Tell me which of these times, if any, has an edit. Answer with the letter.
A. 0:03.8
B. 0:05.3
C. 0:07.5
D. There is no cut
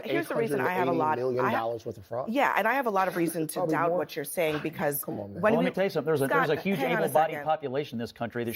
D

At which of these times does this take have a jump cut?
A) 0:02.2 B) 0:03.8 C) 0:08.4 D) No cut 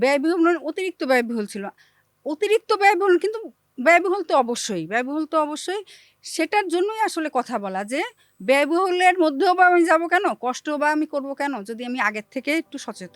D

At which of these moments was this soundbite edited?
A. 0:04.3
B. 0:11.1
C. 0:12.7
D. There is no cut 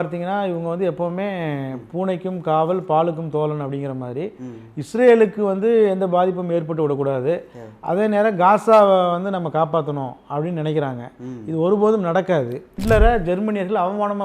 C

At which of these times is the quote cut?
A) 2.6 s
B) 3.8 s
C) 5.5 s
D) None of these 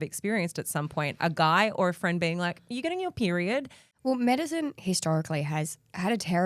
B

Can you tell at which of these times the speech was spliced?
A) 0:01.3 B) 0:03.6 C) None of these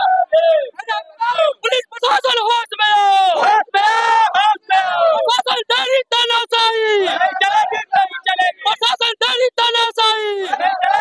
A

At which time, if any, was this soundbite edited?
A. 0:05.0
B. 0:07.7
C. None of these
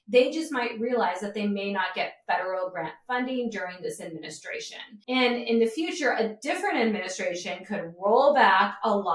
A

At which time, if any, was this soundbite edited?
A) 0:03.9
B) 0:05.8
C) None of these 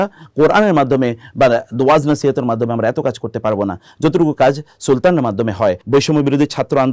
B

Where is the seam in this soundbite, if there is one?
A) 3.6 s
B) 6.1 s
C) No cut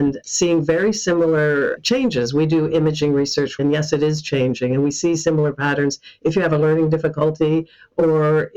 A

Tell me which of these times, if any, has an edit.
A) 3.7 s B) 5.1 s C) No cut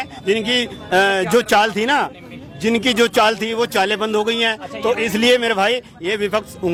C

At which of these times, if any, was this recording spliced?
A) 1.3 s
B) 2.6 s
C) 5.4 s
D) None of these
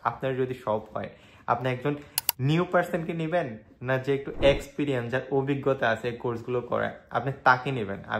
D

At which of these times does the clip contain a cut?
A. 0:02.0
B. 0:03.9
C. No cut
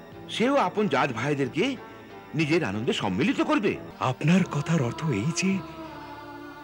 B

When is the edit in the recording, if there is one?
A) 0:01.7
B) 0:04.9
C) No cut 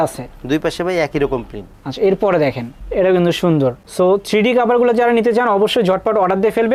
C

